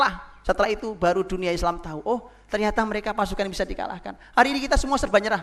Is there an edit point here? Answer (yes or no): no